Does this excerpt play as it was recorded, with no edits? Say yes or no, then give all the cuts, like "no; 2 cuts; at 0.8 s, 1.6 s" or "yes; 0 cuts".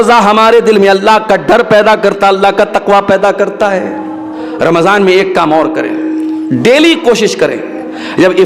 no; 1 cut; at 4.4 s